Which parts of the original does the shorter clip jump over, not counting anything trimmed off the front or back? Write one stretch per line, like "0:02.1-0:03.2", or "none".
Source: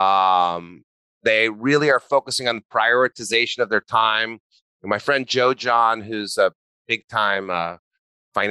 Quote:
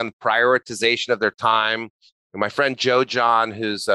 none